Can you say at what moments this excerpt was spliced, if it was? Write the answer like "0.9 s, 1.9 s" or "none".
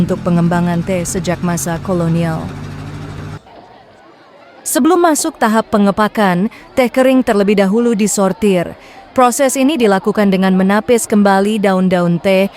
3.4 s